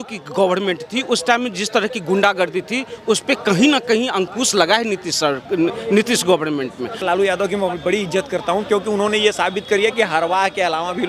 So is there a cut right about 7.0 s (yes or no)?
yes